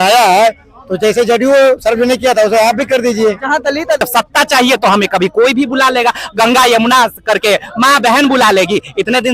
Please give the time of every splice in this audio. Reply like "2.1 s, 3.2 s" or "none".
4.0 s